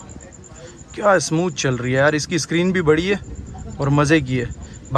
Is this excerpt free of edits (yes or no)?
yes